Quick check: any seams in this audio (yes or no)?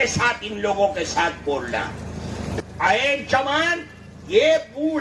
yes